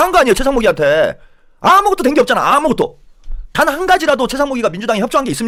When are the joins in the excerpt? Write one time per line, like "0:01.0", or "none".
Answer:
none